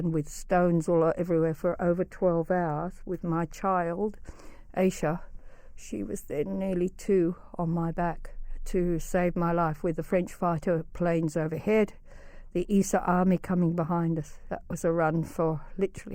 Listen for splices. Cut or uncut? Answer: cut